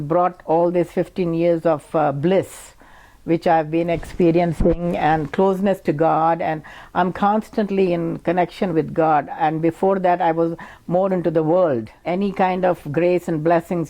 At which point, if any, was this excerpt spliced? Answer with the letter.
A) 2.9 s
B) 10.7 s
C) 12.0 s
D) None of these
C